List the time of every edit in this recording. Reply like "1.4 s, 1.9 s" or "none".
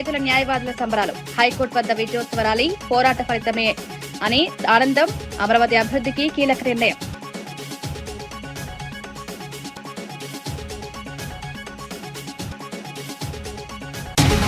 none